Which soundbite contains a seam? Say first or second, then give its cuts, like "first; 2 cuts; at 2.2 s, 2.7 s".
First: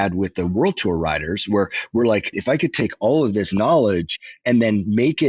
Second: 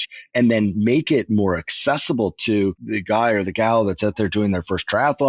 first; 1 cut; at 2.4 s